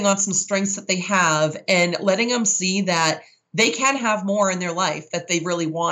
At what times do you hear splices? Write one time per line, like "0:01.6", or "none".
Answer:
none